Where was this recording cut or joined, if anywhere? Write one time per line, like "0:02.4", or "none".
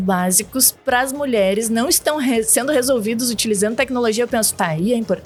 none